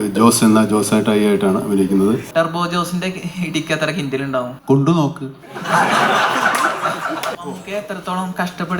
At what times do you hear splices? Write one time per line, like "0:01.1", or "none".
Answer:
0:02.3
0:04.6
0:07.3